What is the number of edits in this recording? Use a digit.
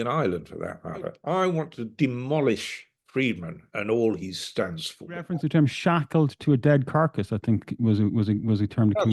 2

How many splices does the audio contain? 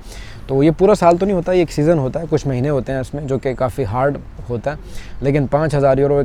0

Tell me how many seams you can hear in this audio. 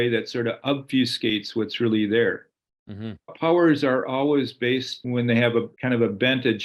3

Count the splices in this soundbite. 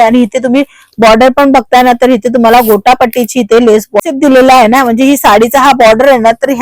1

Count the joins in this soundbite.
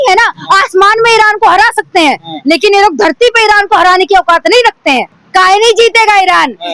1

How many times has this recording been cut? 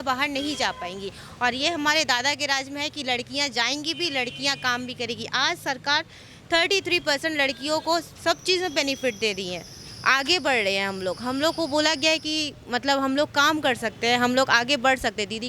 0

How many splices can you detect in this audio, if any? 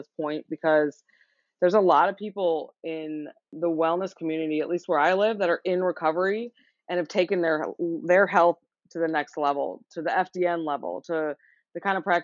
1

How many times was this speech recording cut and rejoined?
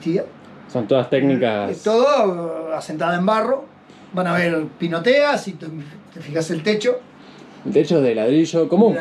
0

